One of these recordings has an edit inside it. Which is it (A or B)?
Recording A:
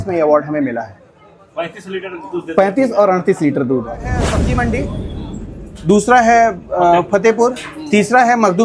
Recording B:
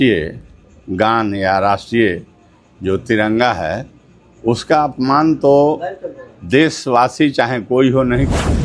A